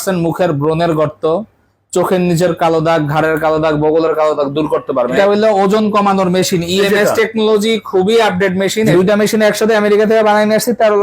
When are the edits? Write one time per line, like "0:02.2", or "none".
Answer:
0:05.1
0:08.9